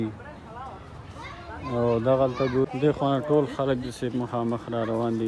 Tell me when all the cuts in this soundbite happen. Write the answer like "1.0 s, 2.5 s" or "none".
2.7 s